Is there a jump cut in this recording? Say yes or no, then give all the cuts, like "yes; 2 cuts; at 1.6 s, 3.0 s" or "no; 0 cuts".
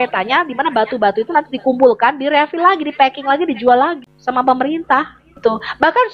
yes; 2 cuts; at 4.1 s, 5.4 s